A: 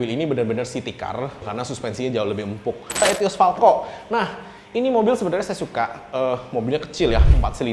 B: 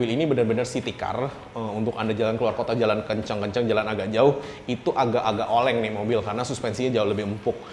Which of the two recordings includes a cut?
A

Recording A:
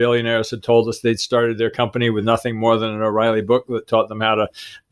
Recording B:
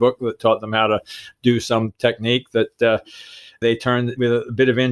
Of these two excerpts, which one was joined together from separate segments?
B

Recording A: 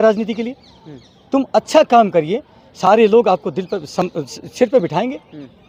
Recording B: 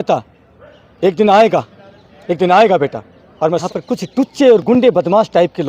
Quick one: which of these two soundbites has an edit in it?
B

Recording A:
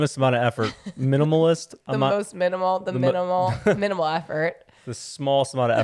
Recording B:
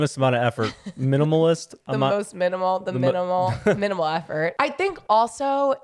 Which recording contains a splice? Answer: B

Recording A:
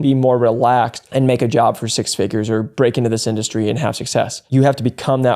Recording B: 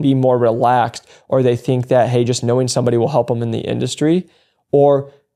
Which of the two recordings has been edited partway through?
A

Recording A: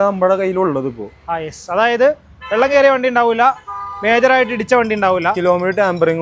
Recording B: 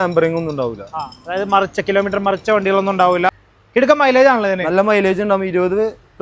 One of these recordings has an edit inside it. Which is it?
B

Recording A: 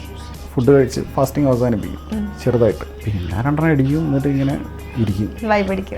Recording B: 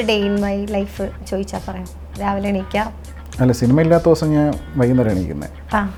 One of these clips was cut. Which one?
A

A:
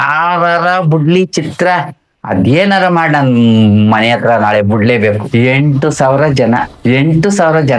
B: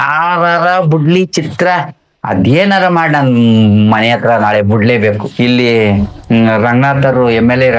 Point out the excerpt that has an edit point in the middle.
A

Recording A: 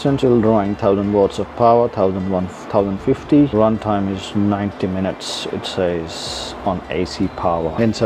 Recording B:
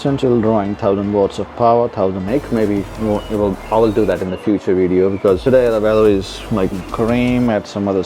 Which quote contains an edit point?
B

